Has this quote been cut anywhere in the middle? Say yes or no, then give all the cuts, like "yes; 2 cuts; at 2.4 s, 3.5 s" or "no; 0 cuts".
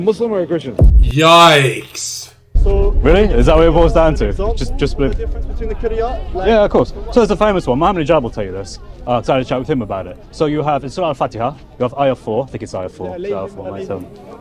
no; 0 cuts